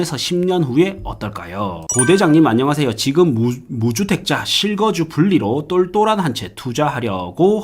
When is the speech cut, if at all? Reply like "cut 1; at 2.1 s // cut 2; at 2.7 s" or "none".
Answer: cut 1; at 1.8 s